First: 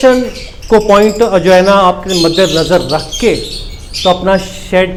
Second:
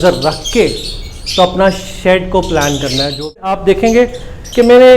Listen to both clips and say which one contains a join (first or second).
second